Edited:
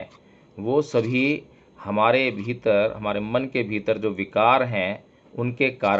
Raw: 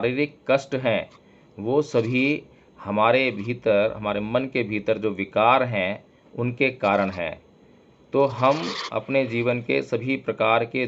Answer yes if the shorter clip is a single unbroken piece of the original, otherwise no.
yes